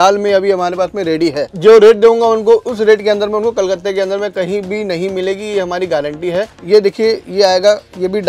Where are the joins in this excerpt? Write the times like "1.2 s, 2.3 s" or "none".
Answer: 1.5 s, 6.5 s